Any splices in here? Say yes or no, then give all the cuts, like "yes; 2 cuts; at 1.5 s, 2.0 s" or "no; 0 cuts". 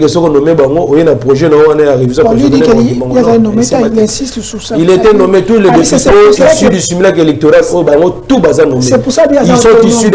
no; 0 cuts